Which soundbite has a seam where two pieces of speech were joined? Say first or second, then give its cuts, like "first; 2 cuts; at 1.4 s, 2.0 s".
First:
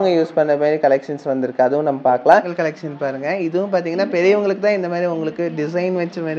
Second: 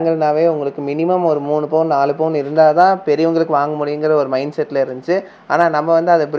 first; 1 cut; at 2.4 s